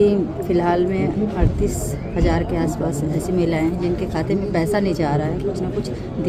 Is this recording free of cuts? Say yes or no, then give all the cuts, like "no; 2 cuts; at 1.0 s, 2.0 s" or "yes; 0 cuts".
yes; 0 cuts